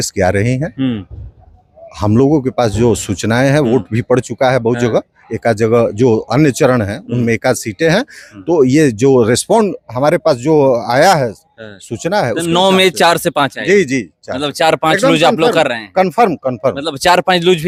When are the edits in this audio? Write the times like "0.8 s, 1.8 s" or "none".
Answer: none